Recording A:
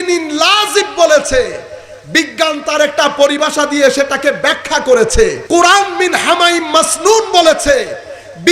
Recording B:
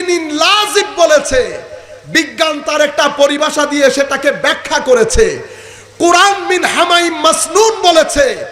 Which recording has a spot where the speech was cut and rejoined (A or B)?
A